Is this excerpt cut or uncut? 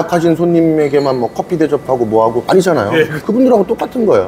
uncut